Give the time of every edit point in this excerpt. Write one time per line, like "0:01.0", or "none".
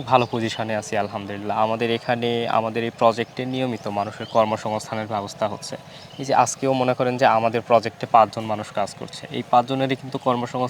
none